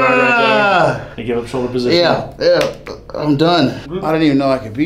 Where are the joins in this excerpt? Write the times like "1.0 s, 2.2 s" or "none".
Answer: 1.1 s, 3.9 s